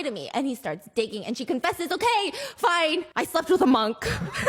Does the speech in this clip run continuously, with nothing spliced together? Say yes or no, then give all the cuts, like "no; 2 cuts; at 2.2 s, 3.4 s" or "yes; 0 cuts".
yes; 0 cuts